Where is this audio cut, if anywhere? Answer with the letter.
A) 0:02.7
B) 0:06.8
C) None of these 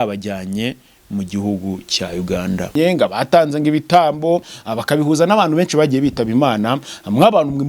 A